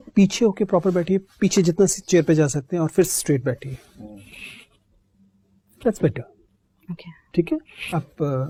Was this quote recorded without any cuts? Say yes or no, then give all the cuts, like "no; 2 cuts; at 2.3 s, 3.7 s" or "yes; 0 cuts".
yes; 0 cuts